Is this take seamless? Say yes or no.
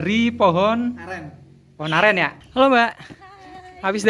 no